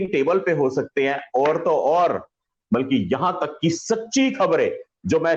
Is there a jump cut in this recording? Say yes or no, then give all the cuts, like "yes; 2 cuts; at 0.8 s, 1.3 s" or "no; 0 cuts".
yes; 1 cut; at 2.5 s